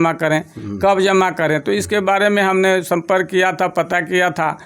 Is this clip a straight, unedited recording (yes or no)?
yes